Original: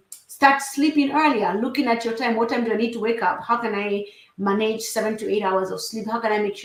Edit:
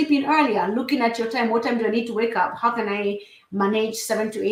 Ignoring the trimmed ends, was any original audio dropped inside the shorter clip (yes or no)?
no